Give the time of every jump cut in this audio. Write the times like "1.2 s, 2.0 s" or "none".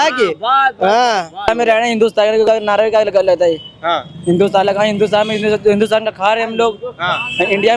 1.5 s